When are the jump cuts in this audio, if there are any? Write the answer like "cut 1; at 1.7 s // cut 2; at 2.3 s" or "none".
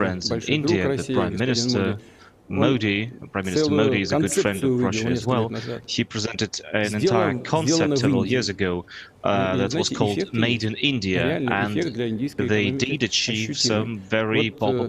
none